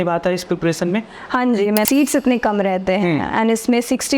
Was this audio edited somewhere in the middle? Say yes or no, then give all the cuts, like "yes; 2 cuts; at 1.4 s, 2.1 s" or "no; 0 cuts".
yes; 1 cut; at 1.9 s